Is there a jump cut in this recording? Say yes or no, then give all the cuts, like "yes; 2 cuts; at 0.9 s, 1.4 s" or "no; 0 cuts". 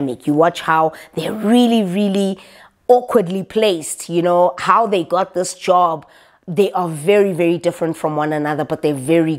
no; 0 cuts